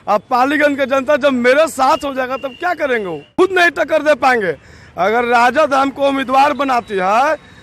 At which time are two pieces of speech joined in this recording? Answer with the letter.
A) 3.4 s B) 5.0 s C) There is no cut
A